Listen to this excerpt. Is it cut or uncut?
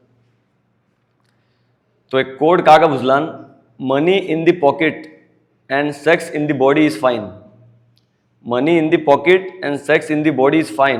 uncut